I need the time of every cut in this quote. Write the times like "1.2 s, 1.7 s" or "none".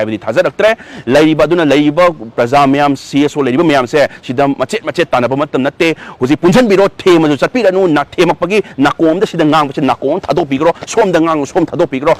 none